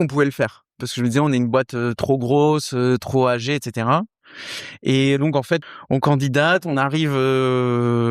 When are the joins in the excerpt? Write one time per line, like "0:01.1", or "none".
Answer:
0:05.6